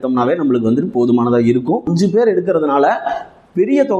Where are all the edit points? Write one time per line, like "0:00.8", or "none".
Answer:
0:01.9